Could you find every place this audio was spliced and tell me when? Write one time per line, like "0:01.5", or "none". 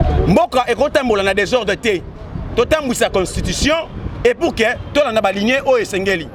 none